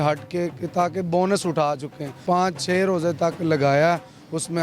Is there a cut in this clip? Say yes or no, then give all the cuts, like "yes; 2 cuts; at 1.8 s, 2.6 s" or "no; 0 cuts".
yes; 1 cut; at 2.1 s